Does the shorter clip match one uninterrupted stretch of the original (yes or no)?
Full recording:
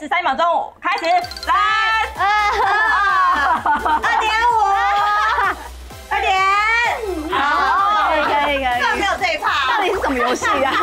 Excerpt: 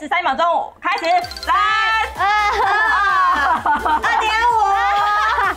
yes